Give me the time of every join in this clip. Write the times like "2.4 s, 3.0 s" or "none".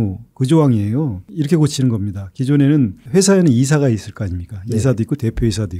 1.3 s, 3.0 s